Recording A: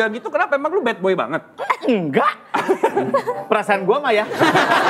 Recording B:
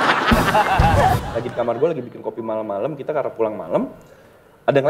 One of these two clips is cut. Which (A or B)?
B